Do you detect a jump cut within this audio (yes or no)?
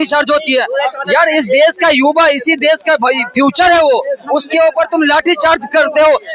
no